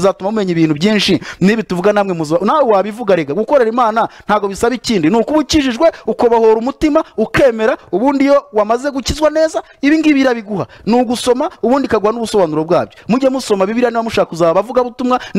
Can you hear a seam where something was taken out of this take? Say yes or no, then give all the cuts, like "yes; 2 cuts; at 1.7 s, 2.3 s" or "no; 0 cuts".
no; 0 cuts